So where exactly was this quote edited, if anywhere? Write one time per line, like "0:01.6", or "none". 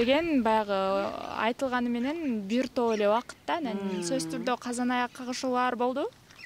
none